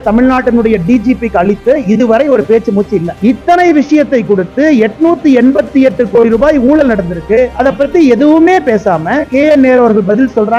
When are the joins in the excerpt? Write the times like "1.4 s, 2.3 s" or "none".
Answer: none